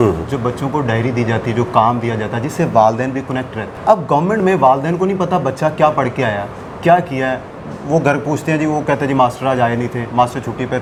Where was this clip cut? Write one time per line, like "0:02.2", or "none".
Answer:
none